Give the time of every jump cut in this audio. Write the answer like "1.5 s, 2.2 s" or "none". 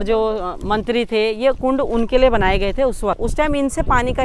3.2 s